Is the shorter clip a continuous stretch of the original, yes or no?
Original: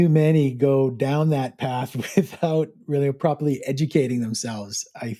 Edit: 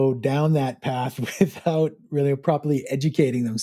yes